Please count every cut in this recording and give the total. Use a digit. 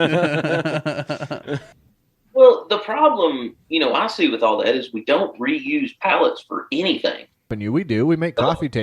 2